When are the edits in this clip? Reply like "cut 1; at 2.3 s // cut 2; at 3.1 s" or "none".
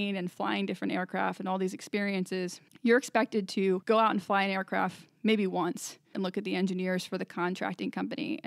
cut 1; at 2.6 s // cut 2; at 3.8 s // cut 3; at 6.1 s